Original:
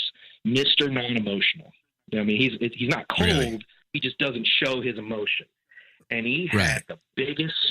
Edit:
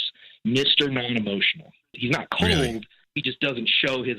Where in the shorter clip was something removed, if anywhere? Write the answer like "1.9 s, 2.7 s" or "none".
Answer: 2.0 s